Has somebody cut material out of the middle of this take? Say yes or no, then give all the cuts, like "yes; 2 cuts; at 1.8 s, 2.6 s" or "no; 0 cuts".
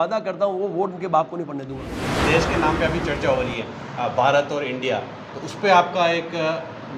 yes; 1 cut; at 2.2 s